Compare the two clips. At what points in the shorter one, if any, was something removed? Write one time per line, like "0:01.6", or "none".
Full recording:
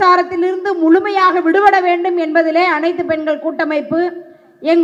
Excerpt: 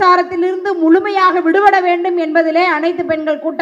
none